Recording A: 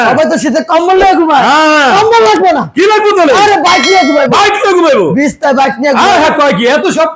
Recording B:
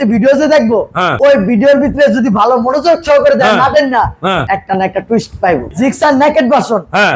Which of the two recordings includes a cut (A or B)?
B